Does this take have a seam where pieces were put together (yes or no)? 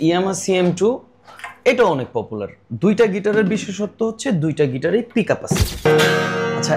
yes